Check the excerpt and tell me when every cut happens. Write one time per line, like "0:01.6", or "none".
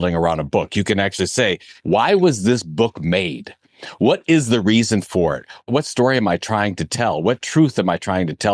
0:01.7
0:05.6